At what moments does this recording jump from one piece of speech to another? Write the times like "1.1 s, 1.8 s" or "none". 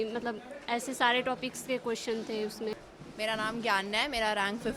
2.7 s